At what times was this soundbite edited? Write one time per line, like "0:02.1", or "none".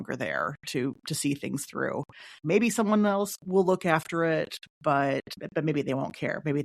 0:05.4